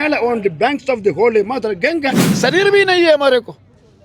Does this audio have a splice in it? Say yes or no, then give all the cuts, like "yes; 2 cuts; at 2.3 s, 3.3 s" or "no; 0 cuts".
yes; 1 cut; at 2.4 s